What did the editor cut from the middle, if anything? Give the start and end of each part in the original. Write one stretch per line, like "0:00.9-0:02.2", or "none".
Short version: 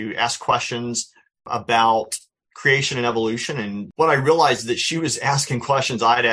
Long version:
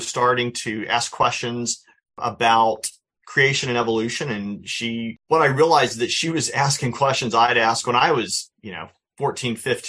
0:04.6-0:05.2